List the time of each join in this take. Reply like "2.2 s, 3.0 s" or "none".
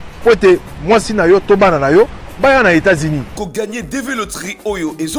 none